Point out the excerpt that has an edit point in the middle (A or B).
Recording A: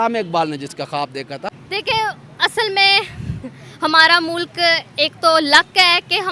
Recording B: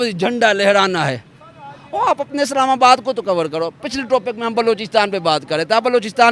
A